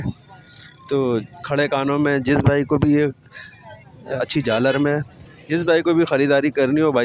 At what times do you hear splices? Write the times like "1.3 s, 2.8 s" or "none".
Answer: 4.2 s